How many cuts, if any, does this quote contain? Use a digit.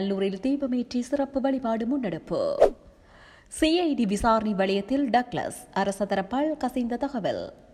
0